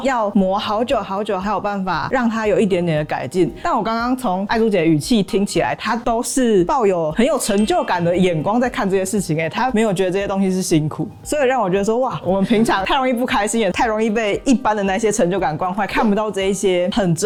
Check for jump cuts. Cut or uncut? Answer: uncut